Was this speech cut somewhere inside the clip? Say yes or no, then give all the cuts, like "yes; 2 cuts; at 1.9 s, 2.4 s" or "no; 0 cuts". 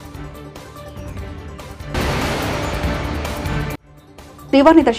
no; 0 cuts